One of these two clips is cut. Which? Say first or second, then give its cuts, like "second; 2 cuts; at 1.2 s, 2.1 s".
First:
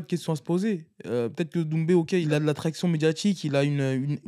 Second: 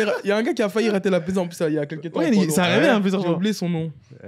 first; 1 cut; at 2.3 s